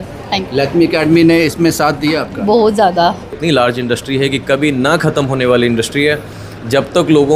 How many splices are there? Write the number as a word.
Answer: one